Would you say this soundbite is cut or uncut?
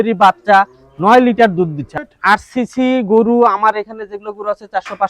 cut